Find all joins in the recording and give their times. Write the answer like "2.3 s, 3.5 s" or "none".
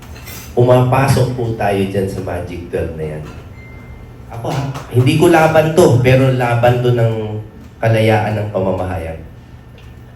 4.6 s